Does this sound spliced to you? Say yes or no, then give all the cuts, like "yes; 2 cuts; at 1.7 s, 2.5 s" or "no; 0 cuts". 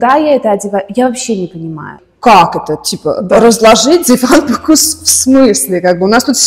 yes; 1 cut; at 1.9 s